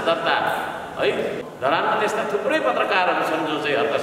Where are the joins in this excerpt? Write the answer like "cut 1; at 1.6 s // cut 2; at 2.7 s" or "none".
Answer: cut 1; at 1.4 s

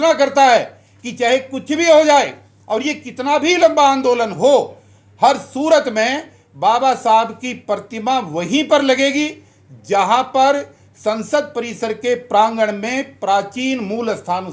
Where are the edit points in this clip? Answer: none

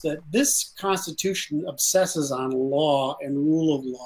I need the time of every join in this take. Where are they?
none

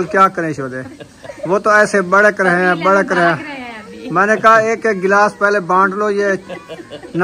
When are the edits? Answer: none

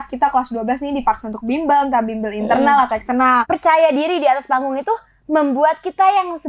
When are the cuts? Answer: cut 1; at 3.4 s

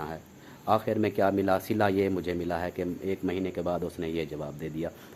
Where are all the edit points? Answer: none

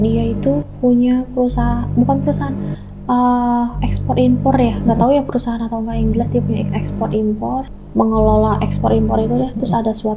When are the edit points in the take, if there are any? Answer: cut 1; at 7.7 s

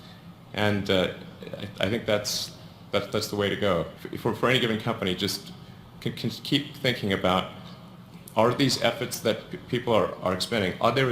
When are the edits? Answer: cut 1; at 3.5 s // cut 2; at 10.2 s

